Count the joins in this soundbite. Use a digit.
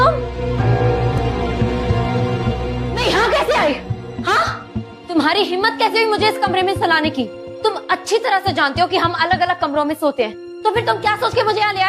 1